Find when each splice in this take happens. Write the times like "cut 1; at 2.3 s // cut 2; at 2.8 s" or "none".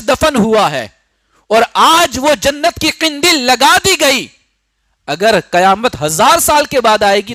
none